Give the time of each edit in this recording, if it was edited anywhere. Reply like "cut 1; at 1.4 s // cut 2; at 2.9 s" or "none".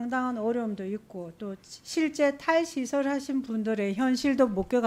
none